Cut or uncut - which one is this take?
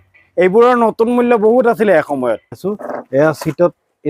cut